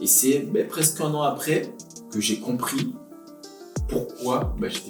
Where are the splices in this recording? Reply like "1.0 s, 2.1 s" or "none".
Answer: none